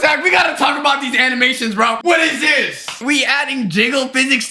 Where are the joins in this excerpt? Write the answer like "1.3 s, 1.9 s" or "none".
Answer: 2.0 s